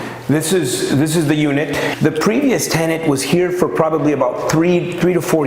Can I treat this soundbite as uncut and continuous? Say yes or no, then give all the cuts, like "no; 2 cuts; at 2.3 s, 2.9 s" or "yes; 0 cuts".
no; 1 cut; at 1.9 s